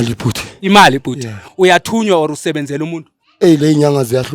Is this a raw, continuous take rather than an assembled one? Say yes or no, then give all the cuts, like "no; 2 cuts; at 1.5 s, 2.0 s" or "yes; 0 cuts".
yes; 0 cuts